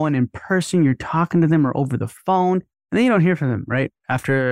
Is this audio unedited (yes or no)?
no